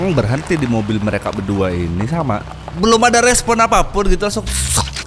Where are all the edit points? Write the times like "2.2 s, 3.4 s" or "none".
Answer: 2.6 s